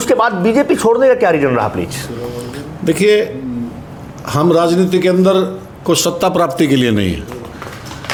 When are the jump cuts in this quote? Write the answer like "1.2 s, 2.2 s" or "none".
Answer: none